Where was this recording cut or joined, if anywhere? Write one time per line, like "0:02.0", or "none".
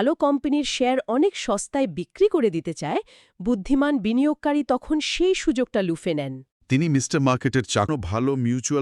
0:07.9

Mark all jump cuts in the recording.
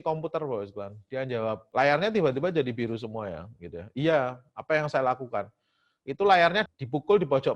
0:01.6
0:06.7

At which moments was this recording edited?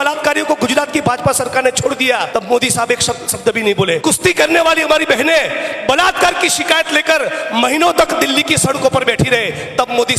0:02.3
0:04.0

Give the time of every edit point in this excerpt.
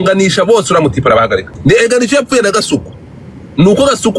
0:01.5

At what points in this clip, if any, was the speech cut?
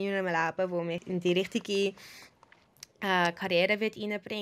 0:01.0

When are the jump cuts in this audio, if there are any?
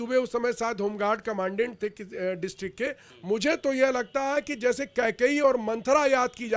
0:03.1

